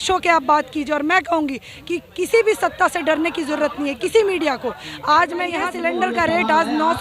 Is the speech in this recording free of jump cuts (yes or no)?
no